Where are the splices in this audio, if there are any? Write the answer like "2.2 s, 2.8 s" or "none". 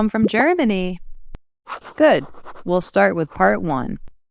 none